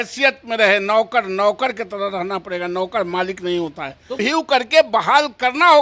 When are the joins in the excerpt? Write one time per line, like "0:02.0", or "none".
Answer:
0:04.1